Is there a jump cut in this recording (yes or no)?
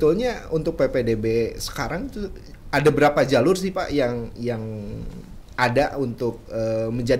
no